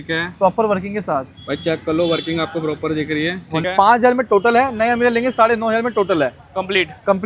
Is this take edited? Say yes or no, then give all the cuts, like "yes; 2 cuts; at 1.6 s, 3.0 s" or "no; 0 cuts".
yes; 1 cut; at 3.6 s